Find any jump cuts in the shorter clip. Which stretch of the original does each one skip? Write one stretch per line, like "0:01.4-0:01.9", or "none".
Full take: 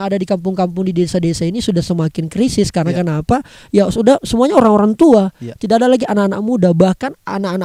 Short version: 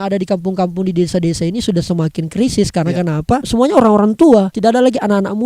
0:03.5-0:04.3
0:05.3-0:05.6